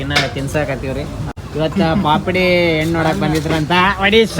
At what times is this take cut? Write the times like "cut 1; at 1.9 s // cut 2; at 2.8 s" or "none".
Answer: cut 1; at 1.3 s